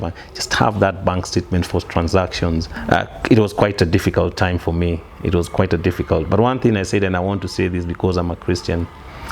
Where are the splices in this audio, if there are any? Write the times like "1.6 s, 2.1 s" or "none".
2.7 s

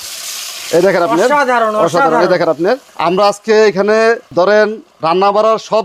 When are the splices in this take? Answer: none

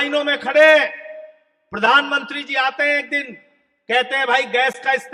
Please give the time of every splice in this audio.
none

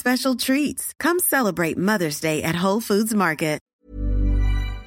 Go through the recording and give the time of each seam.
3.7 s

